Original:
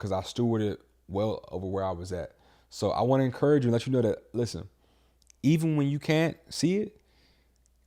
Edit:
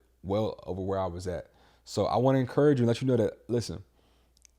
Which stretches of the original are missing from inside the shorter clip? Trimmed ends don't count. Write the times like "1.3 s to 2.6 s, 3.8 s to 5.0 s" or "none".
none